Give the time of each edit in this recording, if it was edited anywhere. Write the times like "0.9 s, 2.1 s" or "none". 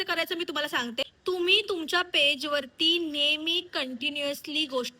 1.1 s